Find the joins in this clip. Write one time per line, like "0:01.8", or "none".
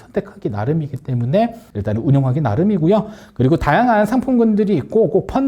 none